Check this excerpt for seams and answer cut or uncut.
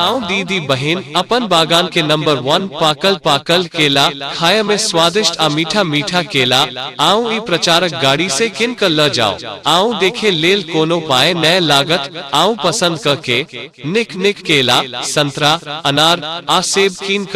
cut